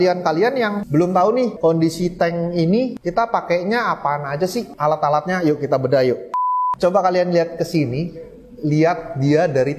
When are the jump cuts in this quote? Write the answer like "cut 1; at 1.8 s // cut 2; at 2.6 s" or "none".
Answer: cut 1; at 0.8 s // cut 2; at 1.5 s // cut 3; at 3.0 s // cut 4; at 4.7 s // cut 5; at 6.5 s